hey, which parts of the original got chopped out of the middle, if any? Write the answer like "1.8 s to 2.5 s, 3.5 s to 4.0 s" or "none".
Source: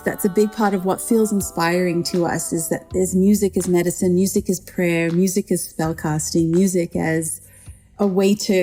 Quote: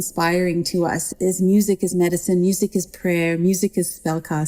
2.5 s to 2.8 s